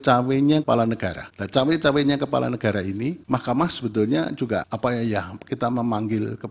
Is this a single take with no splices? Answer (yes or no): yes